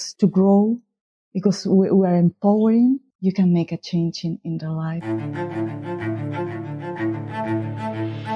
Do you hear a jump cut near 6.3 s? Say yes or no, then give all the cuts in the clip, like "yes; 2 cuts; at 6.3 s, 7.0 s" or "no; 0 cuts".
no; 1 cut; at 5.0 s